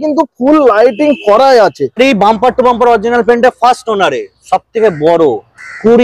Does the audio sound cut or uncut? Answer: cut